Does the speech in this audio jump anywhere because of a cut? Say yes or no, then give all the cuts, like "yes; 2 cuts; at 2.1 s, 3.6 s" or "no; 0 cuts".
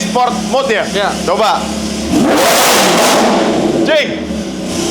no; 0 cuts